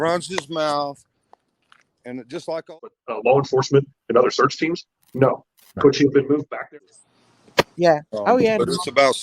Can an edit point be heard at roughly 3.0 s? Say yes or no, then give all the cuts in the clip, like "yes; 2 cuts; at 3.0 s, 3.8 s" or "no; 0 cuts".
yes; 2 cuts; at 3.0 s, 6.7 s